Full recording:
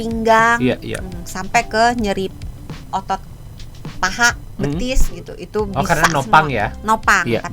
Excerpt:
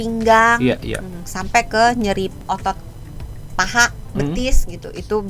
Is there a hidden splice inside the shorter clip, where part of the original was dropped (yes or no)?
yes